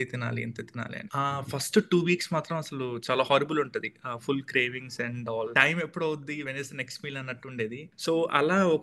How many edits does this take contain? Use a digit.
4